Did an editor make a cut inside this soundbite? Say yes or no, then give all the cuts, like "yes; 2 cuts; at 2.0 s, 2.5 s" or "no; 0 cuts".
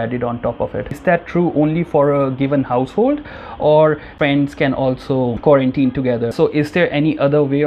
yes; 3 cuts; at 1.0 s, 4.1 s, 6.3 s